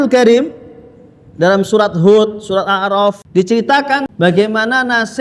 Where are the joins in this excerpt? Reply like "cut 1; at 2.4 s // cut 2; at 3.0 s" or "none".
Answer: cut 1; at 3.2 s // cut 2; at 4.1 s